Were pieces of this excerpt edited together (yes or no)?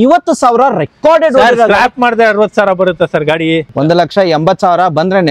yes